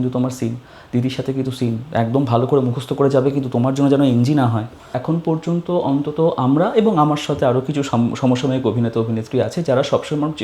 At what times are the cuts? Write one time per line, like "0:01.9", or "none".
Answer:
0:04.9